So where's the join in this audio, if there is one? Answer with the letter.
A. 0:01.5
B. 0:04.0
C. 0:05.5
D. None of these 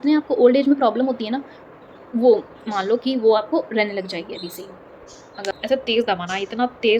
C